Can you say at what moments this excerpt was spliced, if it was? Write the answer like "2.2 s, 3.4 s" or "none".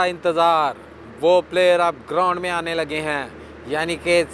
none